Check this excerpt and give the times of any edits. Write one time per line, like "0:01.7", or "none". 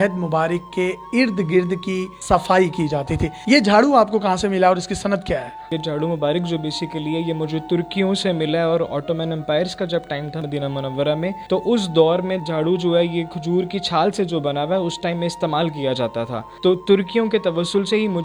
none